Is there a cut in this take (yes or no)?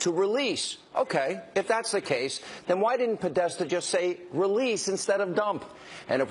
yes